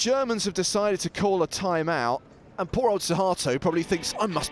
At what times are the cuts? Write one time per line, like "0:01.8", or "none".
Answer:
none